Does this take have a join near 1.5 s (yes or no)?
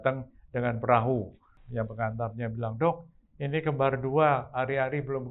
yes